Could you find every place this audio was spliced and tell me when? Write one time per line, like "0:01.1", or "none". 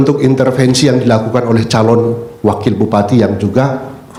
none